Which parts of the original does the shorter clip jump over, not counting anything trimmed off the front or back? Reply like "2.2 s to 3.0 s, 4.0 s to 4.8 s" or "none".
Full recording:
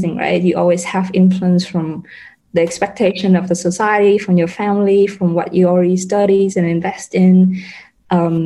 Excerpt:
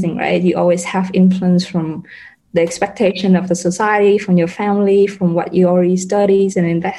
none